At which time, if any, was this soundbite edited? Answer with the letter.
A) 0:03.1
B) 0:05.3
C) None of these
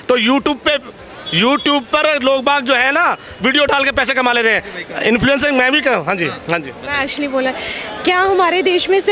C